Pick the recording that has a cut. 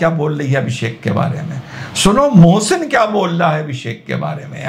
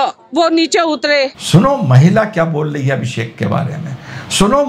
second; 1 cut; at 1.4 s

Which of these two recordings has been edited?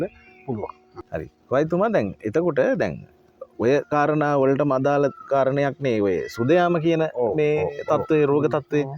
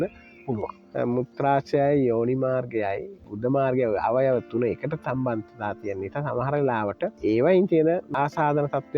second; 3 cuts; at 0.8 s, 7.2 s, 8.1 s

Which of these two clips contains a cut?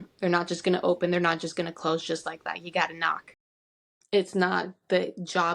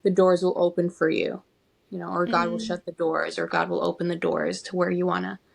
first; 1 cut; at 3.6 s

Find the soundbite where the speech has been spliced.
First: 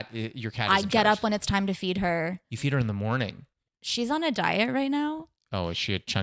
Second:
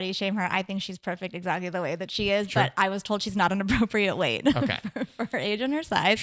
first; 1 cut; at 2.5 s

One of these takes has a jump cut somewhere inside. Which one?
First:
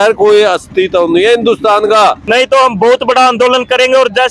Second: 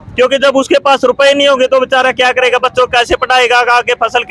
first; 1 cut; at 2.2 s

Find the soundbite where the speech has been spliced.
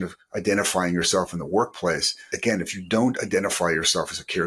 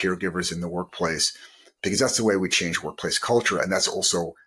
first; 1 cut; at 2.2 s

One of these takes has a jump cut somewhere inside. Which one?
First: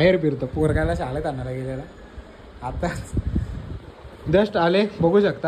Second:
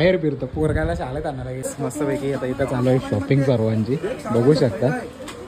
second; 1 cut; at 1.6 s

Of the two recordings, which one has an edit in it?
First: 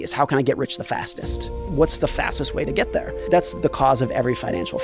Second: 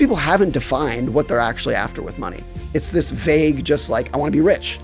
first; 2 cuts; at 1.6 s, 3.5 s

